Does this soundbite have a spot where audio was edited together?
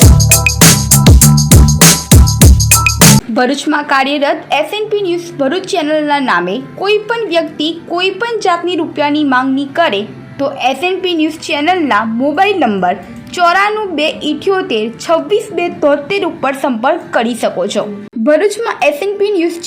yes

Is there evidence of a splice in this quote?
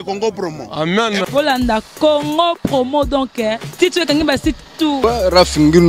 yes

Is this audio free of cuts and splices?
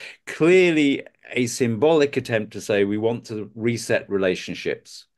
yes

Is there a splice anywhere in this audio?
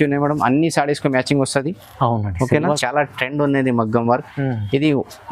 yes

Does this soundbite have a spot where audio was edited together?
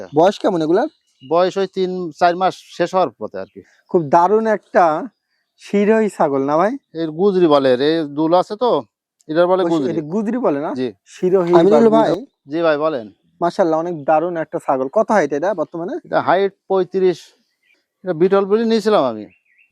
yes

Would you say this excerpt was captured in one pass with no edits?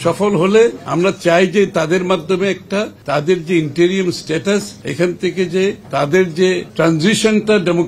no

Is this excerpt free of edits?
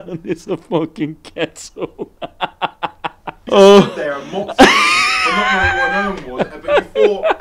no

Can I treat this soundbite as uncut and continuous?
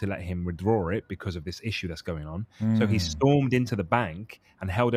yes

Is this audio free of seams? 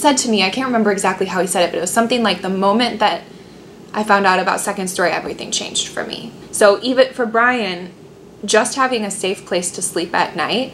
no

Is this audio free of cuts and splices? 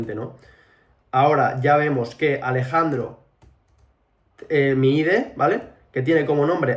yes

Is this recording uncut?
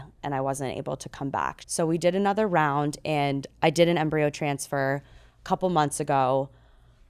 no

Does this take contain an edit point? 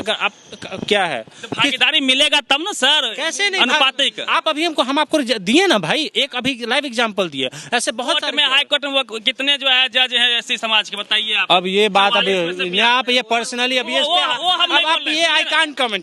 no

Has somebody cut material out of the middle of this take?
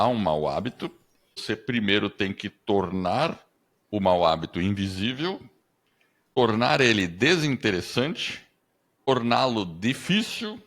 yes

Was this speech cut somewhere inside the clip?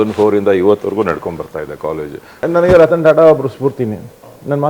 yes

